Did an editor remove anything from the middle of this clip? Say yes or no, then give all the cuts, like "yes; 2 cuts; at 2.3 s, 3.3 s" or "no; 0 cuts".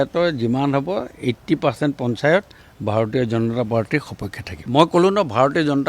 no; 0 cuts